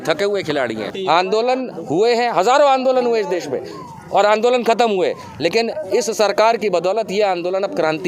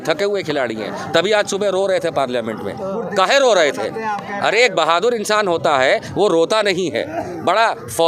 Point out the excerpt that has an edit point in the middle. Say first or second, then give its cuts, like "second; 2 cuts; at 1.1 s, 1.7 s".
first; 1 cut; at 0.9 s